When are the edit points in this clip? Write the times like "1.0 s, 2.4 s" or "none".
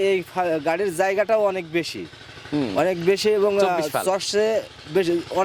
none

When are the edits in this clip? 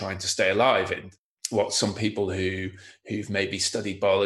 1.1 s

